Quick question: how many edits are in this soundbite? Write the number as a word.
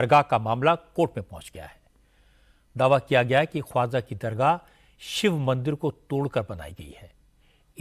zero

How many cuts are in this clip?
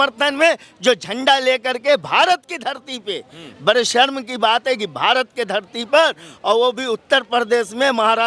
zero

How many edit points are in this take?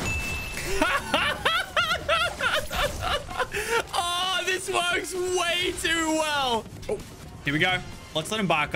one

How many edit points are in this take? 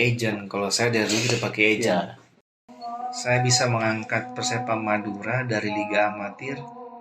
one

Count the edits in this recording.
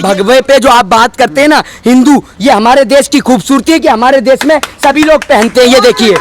one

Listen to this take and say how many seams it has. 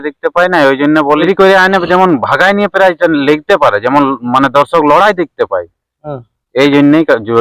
one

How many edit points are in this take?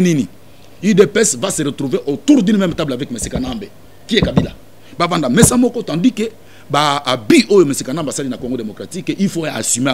zero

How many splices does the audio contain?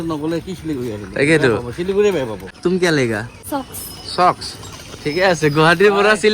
two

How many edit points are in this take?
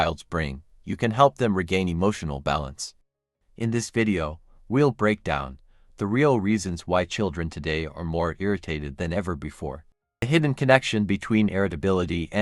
one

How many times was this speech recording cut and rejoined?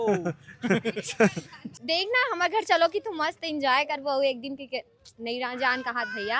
one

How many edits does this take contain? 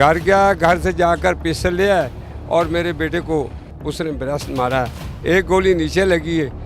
one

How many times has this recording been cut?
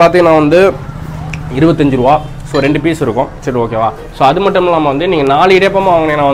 zero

